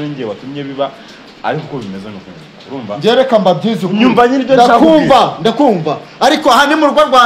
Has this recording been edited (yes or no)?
no